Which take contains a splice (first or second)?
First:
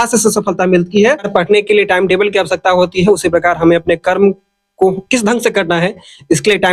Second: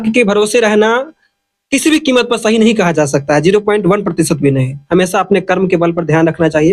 first